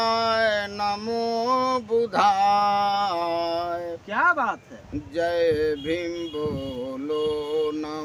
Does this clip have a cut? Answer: no; 0 cuts

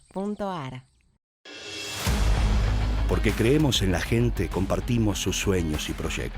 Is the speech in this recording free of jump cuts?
no; 1 cut; at 1.2 s

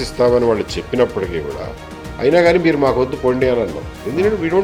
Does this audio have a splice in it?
no; 0 cuts

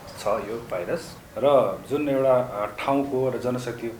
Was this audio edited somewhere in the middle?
yes; 1 cut; at 1.2 s

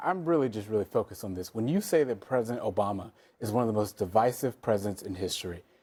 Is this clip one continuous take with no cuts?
yes; 0 cuts

